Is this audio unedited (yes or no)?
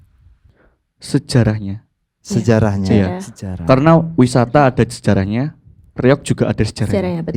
yes